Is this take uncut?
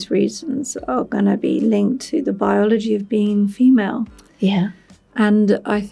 yes; 0 cuts

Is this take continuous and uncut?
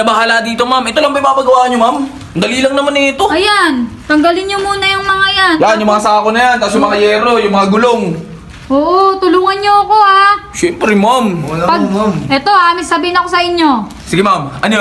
yes; 0 cuts

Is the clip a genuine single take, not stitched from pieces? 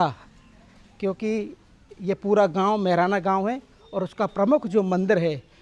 yes; 0 cuts

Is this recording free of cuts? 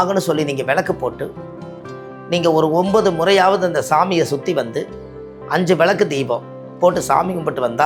yes; 0 cuts

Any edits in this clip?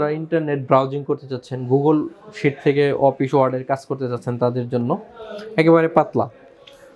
no; 0 cuts

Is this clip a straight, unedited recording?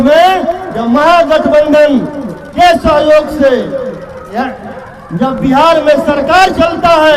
yes; 0 cuts

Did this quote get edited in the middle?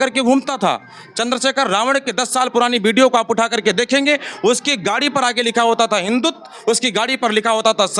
no; 0 cuts

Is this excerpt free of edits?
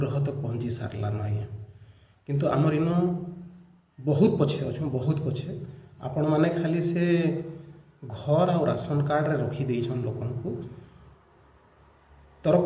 yes; 0 cuts

